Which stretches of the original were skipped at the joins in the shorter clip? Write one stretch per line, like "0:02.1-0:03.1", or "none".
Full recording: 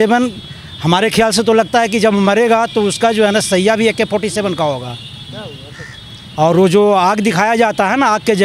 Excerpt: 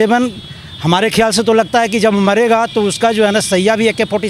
none